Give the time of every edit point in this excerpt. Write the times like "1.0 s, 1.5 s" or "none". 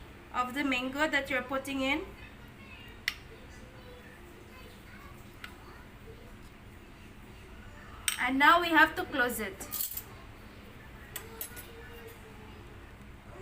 none